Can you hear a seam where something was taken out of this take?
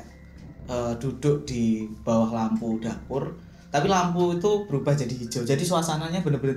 no; 0 cuts

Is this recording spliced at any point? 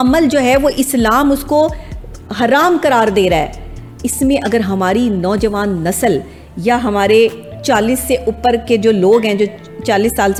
no; 0 cuts

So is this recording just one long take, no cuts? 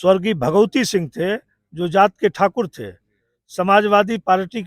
yes; 0 cuts

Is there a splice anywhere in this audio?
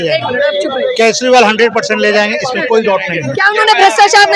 no; 0 cuts

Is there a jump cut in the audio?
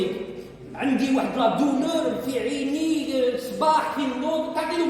no; 0 cuts

